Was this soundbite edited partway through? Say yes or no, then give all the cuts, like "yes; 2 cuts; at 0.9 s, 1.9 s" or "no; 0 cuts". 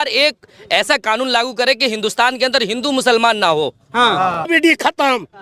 yes; 1 cut; at 4.5 s